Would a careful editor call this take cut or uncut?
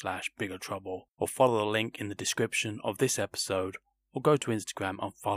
cut